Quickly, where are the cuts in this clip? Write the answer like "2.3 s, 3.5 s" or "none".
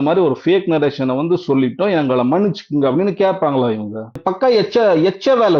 4.3 s